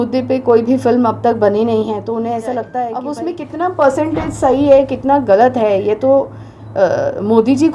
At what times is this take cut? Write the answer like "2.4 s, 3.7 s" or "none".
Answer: 3.0 s